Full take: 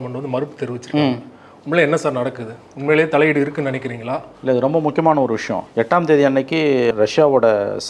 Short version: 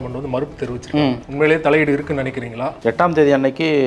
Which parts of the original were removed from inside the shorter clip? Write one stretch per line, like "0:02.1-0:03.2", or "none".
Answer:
0:01.2-0:02.7
0:04.2-0:05.7